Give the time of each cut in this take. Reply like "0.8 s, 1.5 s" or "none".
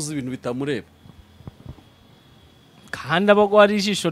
none

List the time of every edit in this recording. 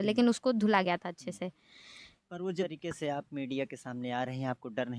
2.6 s

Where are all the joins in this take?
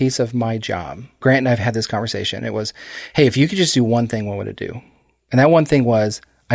1.2 s

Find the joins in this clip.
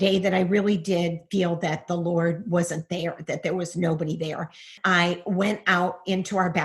4.8 s

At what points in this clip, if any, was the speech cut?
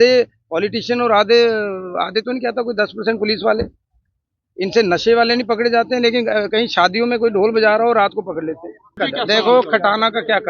9.0 s

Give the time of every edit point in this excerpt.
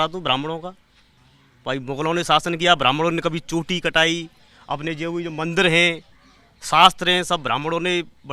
none

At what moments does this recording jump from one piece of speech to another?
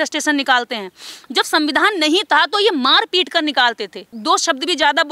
4.1 s

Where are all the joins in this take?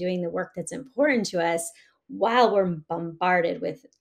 none

